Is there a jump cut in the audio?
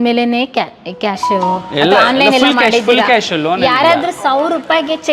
no; 0 cuts

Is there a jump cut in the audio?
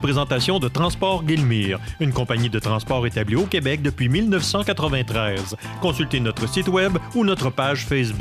no; 0 cuts

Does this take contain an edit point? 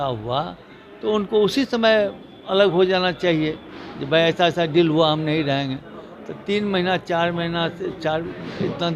no; 0 cuts

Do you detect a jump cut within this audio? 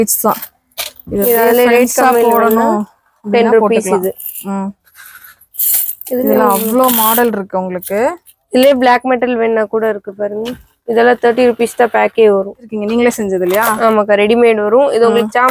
yes; 1 cut; at 12.7 s

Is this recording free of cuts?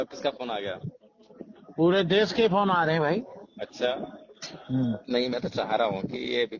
no; 1 cut; at 5.0 s

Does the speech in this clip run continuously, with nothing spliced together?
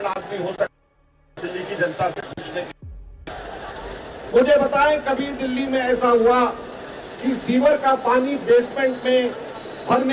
no; 1 cut; at 4.0 s

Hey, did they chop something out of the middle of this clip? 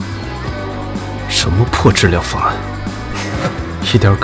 yes; 1 cut; at 1.1 s

